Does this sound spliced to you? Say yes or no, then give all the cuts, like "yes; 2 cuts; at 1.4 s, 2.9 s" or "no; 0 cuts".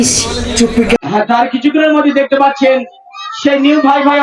yes; 1 cut; at 1.0 s